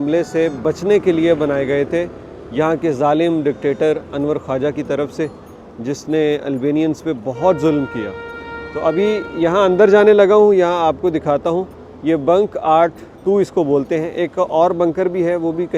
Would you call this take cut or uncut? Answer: uncut